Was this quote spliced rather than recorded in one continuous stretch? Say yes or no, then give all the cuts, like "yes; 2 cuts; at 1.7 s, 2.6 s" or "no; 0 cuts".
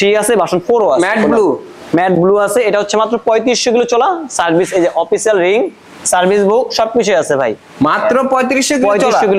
no; 0 cuts